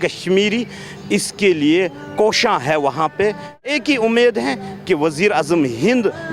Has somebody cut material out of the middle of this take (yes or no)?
yes